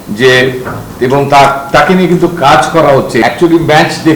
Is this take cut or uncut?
cut